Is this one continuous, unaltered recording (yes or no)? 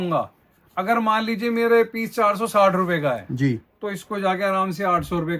yes